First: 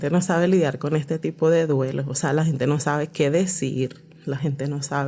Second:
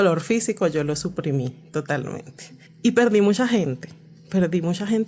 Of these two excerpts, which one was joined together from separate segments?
second; 1 cut; at 2.6 s

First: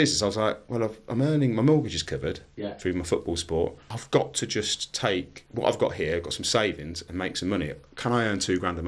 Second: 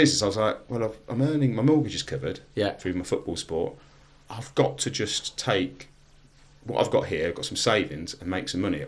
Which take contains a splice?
first; 2 cuts; at 3.9 s, 5.4 s

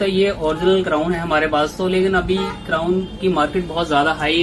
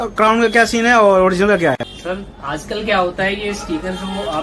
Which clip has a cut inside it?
second; 1 cut; at 1.9 s

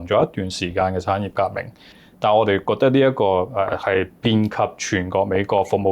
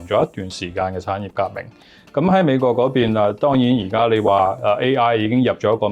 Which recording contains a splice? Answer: first; 1 cut; at 2.0 s

